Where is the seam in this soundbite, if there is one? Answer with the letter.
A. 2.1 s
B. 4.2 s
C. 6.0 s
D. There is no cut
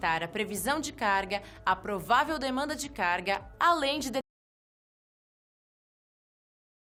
D